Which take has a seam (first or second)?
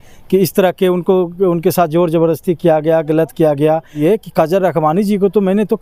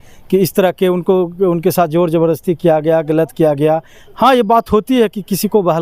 first